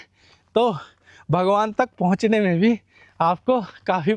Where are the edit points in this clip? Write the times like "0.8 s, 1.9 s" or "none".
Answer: none